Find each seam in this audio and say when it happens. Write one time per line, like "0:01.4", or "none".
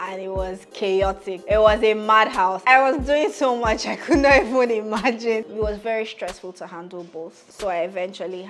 0:01.3
0:02.6
0:05.5
0:07.4